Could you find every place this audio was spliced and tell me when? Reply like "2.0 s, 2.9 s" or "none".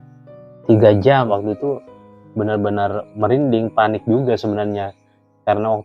1.3 s